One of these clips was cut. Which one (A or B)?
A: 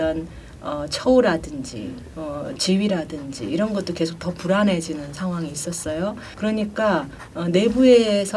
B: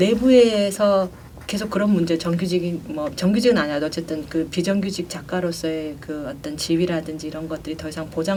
A